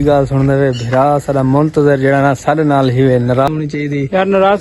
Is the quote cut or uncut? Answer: cut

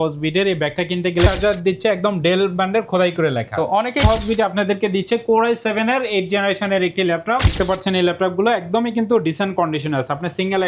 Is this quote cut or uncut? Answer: cut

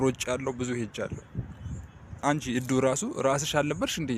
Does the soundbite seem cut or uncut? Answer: cut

